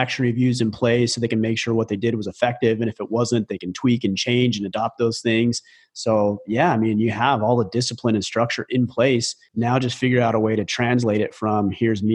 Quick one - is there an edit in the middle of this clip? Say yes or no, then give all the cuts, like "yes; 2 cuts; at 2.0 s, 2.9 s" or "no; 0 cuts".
yes; 1 cut; at 9.4 s